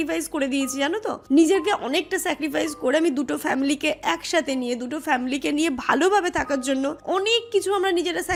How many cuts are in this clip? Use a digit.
0